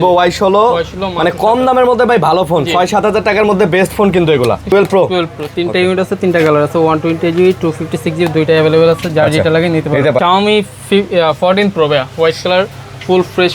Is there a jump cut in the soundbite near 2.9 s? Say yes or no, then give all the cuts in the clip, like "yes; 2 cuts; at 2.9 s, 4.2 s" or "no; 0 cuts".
no; 2 cuts; at 4.7 s, 10.2 s